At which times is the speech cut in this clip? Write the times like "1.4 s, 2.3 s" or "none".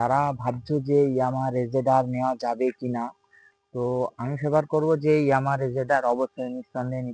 none